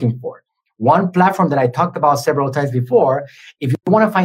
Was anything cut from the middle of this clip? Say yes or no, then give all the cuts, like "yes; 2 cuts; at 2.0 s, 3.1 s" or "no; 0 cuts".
no; 0 cuts